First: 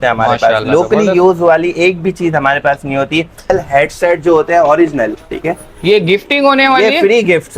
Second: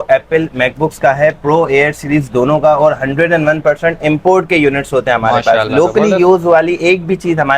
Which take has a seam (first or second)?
first